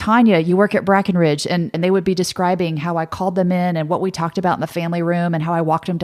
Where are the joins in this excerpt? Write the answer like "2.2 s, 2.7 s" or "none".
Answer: 1.7 s